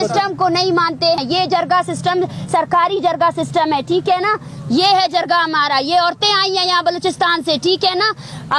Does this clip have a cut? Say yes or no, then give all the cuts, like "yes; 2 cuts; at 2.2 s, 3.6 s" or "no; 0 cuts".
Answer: yes; 1 cut; at 1.2 s